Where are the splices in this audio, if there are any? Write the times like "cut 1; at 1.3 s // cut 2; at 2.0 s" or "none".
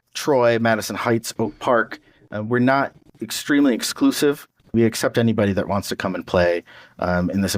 cut 1; at 4.7 s